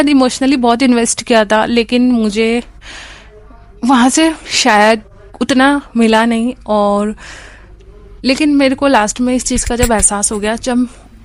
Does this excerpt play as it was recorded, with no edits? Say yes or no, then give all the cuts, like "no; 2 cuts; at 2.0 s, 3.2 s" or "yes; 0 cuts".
yes; 0 cuts